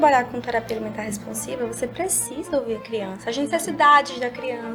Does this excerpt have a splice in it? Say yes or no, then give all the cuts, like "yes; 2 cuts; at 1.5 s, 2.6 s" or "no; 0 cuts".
no; 0 cuts